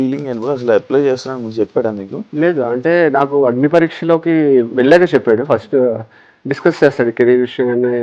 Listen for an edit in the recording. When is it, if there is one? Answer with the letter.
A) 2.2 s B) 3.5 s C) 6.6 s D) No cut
A